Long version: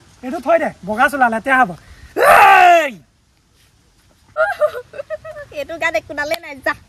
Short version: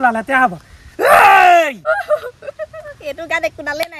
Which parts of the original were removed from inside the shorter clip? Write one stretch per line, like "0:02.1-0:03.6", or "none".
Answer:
0:03.0-0:04.3